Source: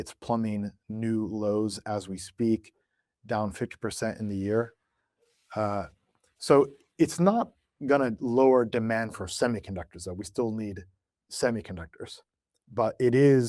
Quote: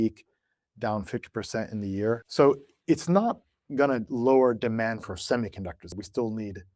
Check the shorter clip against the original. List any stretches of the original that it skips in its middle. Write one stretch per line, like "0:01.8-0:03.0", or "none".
0:04.7-0:06.4
0:10.0-0:10.1